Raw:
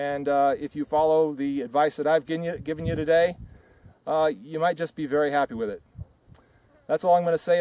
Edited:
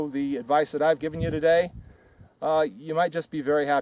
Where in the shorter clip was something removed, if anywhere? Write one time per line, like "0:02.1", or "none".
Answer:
0:01.0